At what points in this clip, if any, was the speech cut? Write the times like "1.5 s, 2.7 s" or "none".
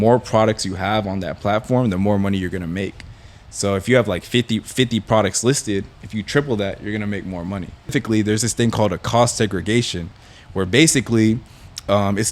7.9 s